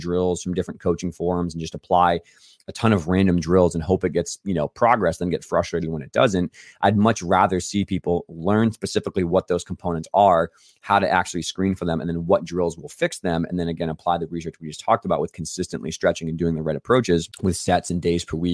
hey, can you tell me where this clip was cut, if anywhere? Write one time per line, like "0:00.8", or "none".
0:17.3